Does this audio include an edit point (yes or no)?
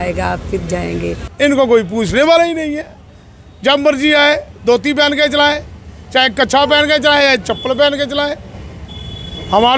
yes